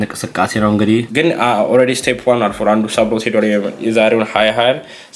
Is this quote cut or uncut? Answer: cut